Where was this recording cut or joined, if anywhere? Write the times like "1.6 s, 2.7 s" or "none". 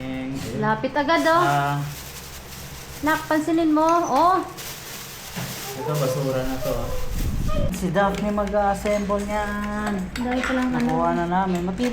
7.8 s